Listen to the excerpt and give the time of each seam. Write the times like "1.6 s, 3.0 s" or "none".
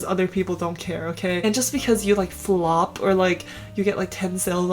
1.4 s